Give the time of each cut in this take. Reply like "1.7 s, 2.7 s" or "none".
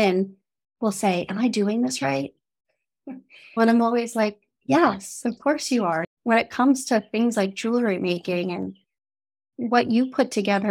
6.0 s